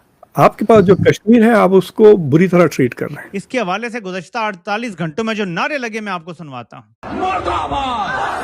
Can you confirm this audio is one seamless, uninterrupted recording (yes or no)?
no